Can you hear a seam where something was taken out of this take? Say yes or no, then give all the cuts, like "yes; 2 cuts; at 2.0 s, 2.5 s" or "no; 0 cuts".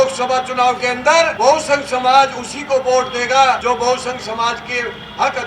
yes; 2 cuts; at 1.3 s, 3.6 s